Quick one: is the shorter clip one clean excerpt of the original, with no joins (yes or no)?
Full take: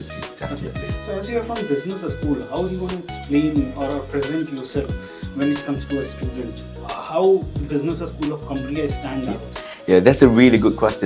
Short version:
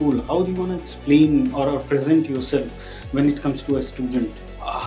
yes